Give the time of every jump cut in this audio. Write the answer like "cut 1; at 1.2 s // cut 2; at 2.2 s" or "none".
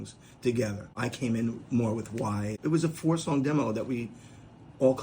cut 1; at 0.9 s // cut 2; at 2.5 s

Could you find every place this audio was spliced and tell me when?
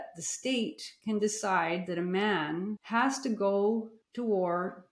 cut 1; at 2.8 s // cut 2; at 4.0 s

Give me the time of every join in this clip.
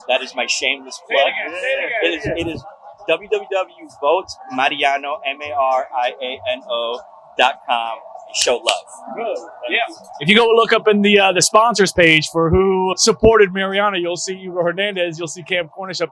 none

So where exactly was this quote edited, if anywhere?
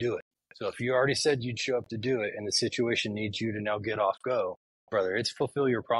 none

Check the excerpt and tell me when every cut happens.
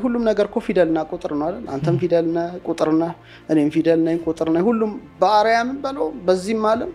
none

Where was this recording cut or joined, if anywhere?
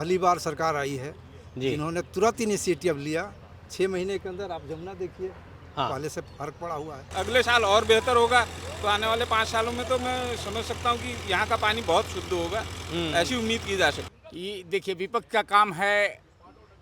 cut 1; at 7.0 s // cut 2; at 14.0 s

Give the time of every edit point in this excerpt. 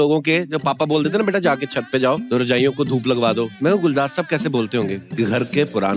cut 1; at 2.2 s // cut 2; at 3.5 s // cut 3; at 5.0 s

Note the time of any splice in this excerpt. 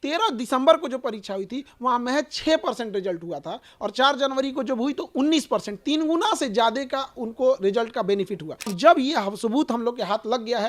cut 1; at 8.8 s

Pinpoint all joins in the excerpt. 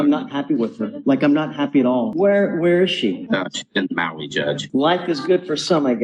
cut 1; at 2.1 s // cut 2; at 4.6 s

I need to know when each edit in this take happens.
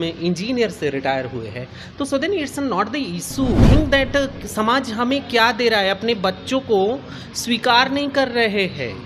cut 1; at 3.6 s

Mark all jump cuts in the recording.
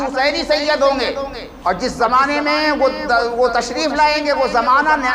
cut 1; at 1.1 s

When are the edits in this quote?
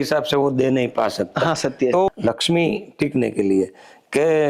cut 1; at 2.1 s

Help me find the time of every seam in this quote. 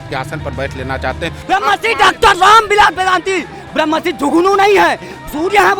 cut 1; at 1.4 s

